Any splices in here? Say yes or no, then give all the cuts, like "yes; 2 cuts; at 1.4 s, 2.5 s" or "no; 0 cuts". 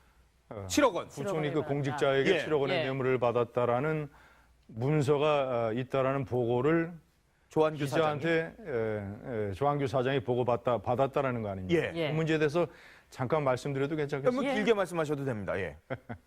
no; 0 cuts